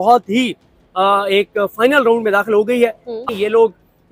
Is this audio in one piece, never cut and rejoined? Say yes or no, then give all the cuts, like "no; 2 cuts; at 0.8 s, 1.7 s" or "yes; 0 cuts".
no; 1 cut; at 3.1 s